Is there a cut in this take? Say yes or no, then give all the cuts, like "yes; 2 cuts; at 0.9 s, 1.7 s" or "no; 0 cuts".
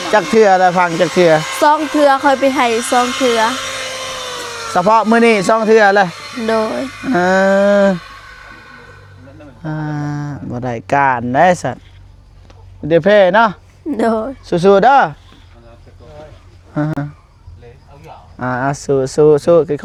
no; 0 cuts